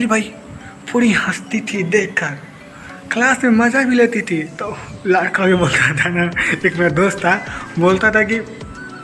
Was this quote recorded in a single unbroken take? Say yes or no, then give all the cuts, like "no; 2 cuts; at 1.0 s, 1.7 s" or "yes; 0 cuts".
yes; 0 cuts